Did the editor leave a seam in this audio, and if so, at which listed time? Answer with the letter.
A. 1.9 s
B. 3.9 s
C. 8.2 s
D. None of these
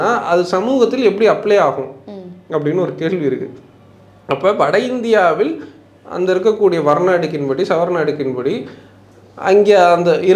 D